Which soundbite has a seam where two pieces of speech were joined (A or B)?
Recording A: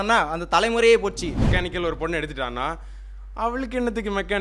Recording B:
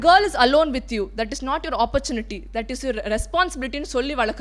A